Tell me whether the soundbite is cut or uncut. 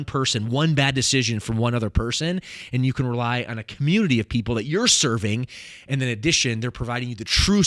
uncut